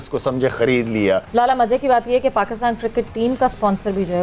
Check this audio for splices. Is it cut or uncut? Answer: cut